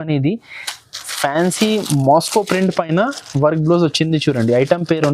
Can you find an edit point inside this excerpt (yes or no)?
no